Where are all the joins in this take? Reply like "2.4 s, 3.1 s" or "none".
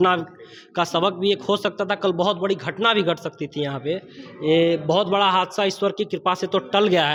none